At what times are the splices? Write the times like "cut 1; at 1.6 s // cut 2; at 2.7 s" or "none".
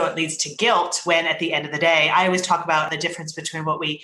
cut 1; at 2.9 s